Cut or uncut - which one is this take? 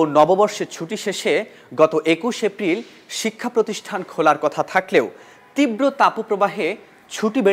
uncut